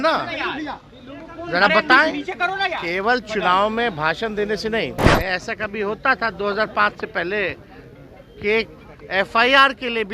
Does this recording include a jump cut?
yes; 1 cut; at 5.1 s

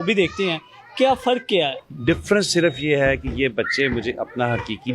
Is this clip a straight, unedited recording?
yes; 0 cuts

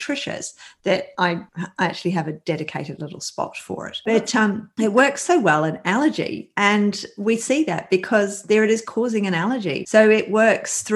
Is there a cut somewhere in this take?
no; 0 cuts

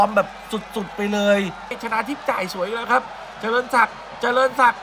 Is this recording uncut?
no; 1 cut; at 1.8 s

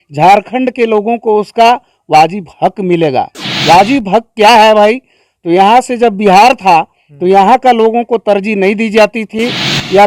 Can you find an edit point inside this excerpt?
no; 0 cuts

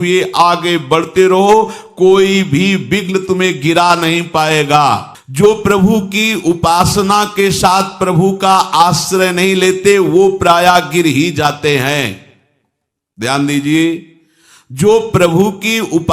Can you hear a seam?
no; 0 cuts

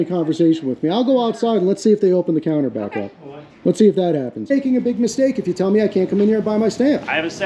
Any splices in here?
yes; 1 cut; at 4.5 s

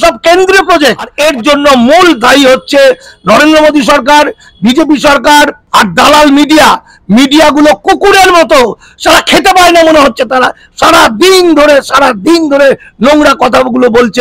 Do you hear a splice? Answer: yes; 2 cuts; at 1.1 s, 5.6 s

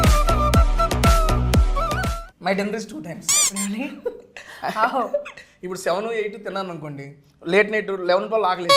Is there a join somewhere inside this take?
yes; 1 cut; at 2.2 s

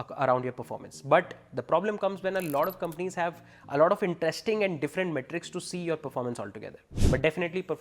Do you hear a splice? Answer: yes; 1 cut; at 6.9 s

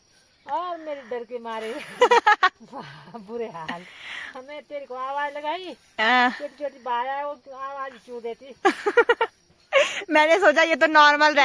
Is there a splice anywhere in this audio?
no; 0 cuts

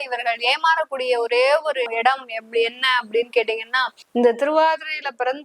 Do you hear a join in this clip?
yes; 2 cuts; at 1.9 s, 3.9 s

